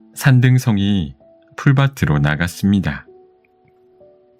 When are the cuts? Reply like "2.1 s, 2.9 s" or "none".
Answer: 3.1 s